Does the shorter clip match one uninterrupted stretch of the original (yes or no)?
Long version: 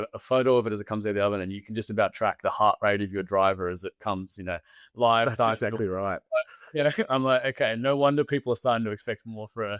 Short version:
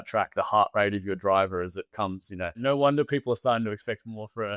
no